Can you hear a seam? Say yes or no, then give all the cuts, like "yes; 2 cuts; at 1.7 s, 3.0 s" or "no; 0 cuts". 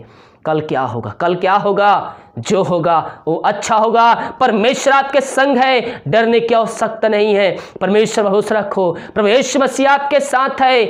no; 0 cuts